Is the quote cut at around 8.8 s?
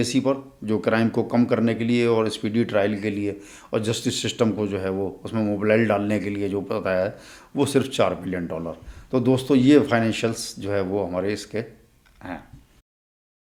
no; 0 cuts

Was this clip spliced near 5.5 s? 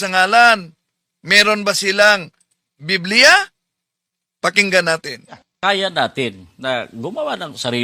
yes; 1 cut; at 5.5 s

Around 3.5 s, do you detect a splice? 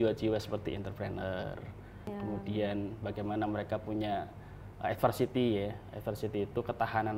no; 1 cut; at 2.1 s

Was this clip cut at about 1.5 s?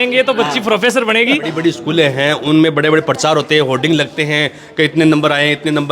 yes; 1 cut; at 1.5 s

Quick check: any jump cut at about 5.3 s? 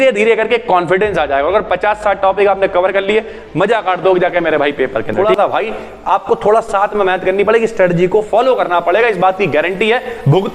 yes; 1 cut; at 5.3 s

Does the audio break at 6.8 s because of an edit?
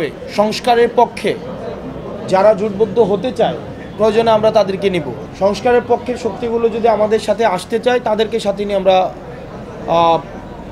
no; 1 cut; at 5.2 s

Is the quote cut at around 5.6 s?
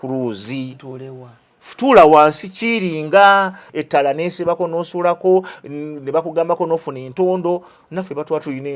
no; 1 cut; at 3.6 s

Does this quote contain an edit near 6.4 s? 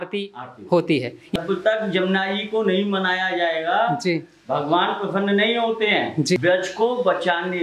yes; 2 cuts; at 1.4 s, 6.4 s

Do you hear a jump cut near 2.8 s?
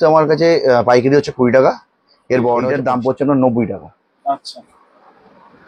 yes; 1 cut; at 2.8 s

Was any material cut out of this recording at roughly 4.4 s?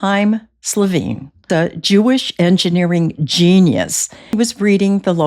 yes; 2 cuts; at 1.5 s, 4.4 s

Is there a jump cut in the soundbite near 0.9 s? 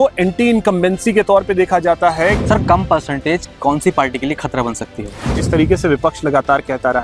no; 2 cuts; at 2.4 s, 5.4 s

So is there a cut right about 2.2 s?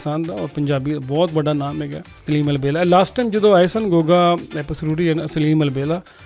yes; 1 cut; at 2.2 s

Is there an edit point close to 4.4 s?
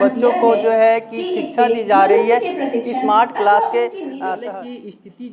yes; 1 cut; at 4.4 s

